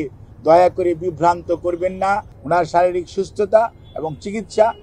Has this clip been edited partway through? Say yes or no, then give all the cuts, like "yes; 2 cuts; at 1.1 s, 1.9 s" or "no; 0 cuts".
yes; 1 cut; at 2.3 s